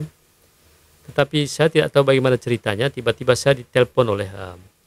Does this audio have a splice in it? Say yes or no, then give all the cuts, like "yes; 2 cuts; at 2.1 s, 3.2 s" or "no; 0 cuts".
no; 0 cuts